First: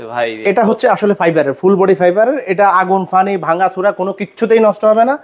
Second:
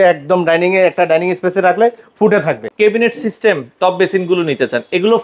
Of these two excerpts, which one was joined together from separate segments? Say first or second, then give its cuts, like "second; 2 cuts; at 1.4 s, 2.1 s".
second; 1 cut; at 2.7 s